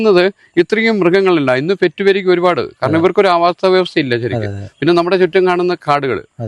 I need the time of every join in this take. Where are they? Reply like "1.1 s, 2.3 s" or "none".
none